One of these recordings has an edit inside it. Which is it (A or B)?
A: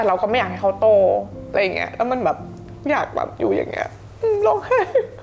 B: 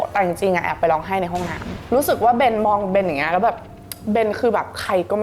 B